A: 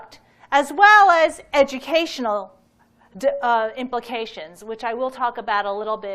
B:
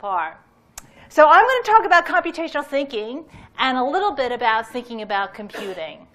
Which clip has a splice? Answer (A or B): A